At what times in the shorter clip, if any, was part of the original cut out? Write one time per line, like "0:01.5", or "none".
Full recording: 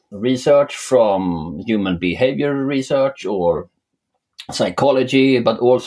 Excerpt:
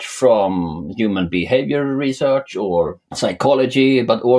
0:03.0